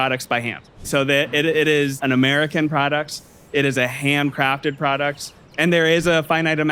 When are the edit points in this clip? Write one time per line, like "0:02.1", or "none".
0:00.9
0:02.0
0:05.4